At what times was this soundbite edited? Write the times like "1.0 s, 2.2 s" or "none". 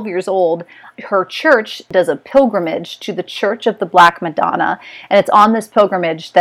1.8 s